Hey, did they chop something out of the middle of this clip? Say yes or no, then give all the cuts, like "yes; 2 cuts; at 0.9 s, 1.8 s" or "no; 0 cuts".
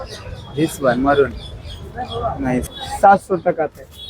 yes; 1 cut; at 2.7 s